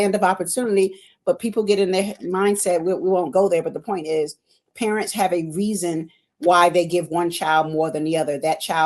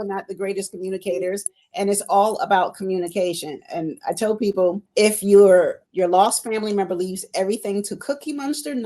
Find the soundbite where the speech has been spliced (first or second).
second